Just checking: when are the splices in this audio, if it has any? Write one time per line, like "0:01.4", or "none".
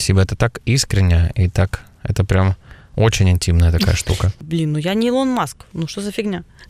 0:04.4